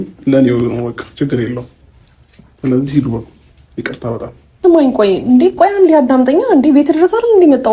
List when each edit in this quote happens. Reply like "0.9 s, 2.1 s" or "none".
4.6 s